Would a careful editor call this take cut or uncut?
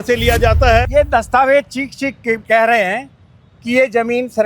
cut